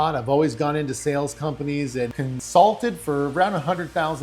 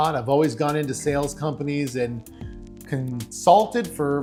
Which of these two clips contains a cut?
first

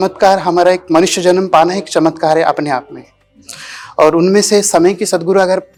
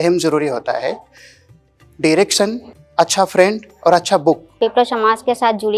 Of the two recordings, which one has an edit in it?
second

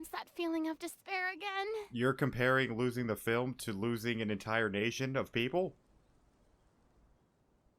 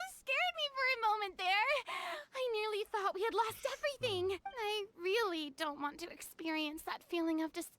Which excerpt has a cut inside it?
second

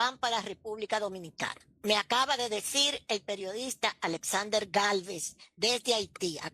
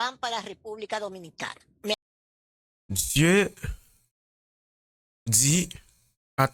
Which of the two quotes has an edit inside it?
first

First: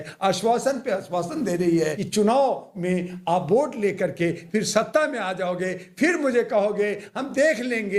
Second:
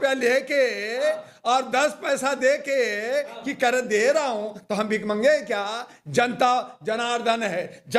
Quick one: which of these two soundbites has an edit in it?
first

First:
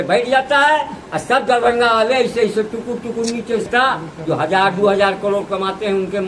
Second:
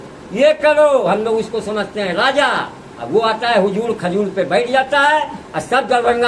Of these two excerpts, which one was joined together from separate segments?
first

